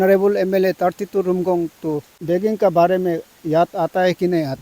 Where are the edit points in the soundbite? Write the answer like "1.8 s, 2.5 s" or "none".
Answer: 2.1 s